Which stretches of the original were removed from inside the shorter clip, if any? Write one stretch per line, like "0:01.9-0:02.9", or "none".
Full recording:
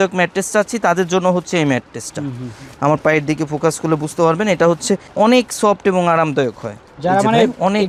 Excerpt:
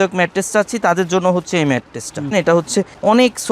0:02.3-0:04.4